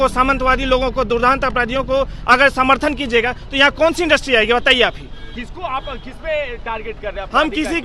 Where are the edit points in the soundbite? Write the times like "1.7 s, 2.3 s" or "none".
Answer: none

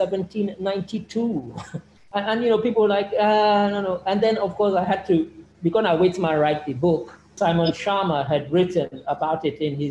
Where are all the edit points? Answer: 1.9 s, 7.4 s

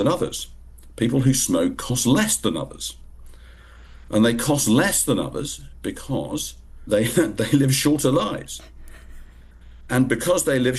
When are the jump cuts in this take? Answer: none

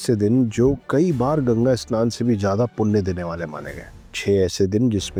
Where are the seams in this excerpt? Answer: none

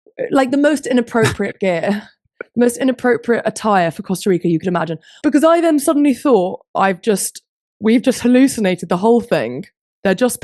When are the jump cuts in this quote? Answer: 5.0 s

